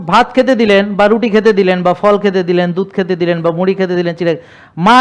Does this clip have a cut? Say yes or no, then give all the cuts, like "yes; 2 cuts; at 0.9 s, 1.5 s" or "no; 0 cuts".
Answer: no; 0 cuts